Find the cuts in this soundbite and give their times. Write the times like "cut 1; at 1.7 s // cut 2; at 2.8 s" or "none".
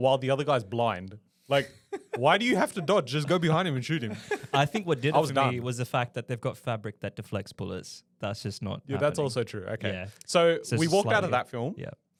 none